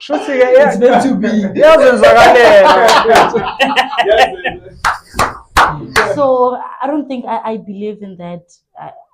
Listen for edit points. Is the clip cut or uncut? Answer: cut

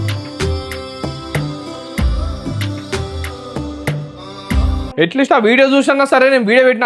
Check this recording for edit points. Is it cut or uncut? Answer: cut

